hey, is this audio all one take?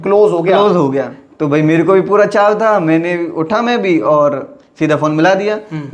no; 1 cut; at 1.2 s

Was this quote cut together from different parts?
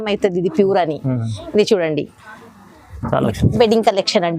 yes; 1 cut; at 3.3 s

